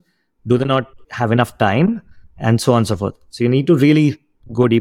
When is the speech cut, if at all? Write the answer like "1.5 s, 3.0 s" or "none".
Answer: 1.0 s